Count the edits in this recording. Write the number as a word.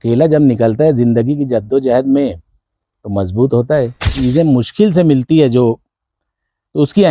one